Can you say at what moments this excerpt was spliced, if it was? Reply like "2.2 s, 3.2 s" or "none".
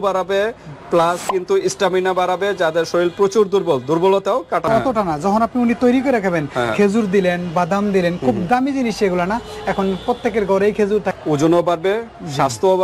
4.7 s, 11.2 s

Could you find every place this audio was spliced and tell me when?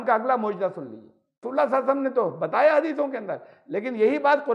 1.4 s

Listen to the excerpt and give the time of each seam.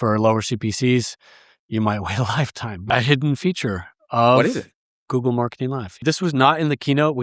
2.7 s, 6.0 s

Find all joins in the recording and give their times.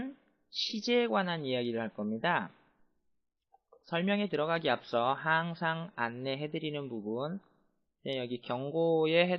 none

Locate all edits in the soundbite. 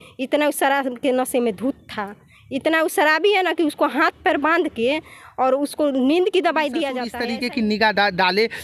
7.1 s

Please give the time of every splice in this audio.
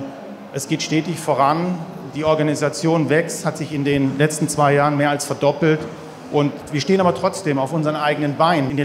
none

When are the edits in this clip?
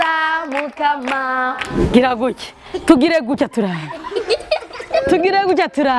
1.7 s

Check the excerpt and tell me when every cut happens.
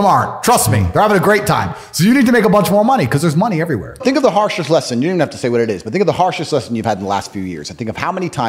none

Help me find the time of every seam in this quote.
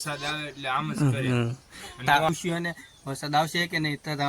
2.3 s

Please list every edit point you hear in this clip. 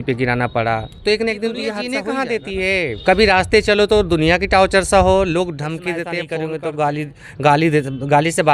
1.9 s, 6.2 s

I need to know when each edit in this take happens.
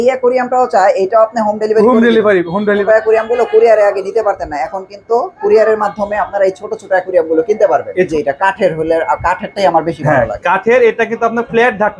2.8 s, 8.1 s

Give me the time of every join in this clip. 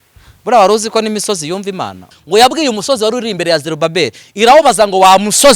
2.1 s

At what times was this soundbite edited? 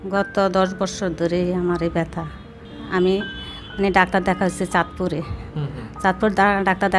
2.7 s

